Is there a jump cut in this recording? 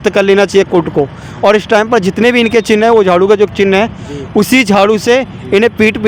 no; 0 cuts

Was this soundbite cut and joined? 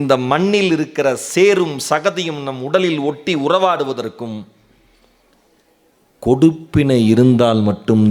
no; 0 cuts

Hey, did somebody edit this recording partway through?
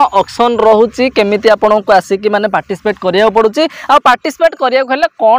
no; 0 cuts

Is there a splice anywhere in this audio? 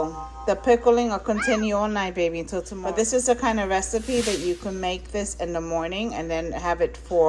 yes; 1 cut; at 2.7 s

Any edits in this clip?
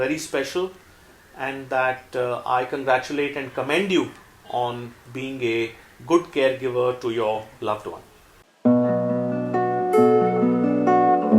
yes; 1 cut; at 8.2 s

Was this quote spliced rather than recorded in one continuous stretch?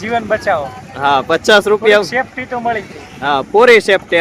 no; 0 cuts

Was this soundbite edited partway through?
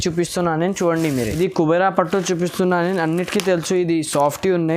yes; 1 cut; at 1.3 s

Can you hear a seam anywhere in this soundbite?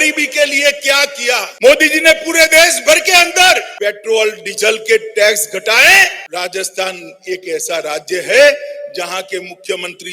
yes; 3 cuts; at 1.5 s, 3.7 s, 6.2 s

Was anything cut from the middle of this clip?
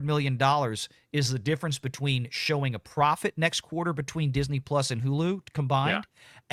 no; 0 cuts

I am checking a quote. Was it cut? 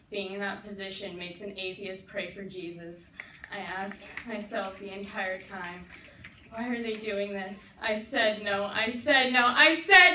no; 0 cuts

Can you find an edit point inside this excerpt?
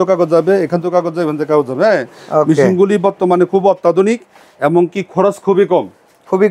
no; 0 cuts

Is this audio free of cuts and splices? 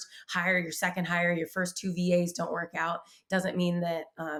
yes; 0 cuts

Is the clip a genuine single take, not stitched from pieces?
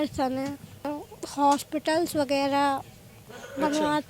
no; 1 cut; at 1.0 s

